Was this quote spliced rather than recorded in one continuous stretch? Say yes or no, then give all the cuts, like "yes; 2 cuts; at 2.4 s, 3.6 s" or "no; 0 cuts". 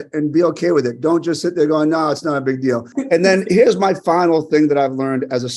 yes; 1 cut; at 2.9 s